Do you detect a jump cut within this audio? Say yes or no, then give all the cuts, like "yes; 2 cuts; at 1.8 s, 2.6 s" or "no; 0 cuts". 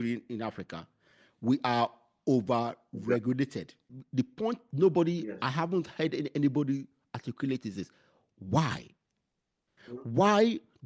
yes; 1 cut; at 3.9 s